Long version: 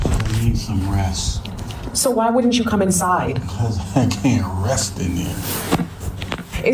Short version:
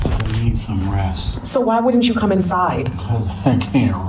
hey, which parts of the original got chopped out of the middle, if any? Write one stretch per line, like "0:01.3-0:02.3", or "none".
0:01.3-0:01.8